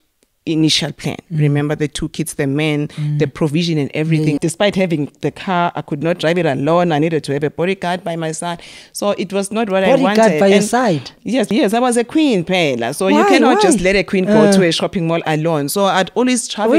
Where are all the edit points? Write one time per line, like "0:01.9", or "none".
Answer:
0:04.4
0:11.5